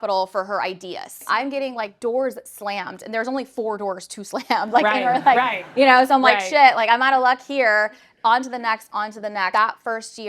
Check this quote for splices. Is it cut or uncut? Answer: cut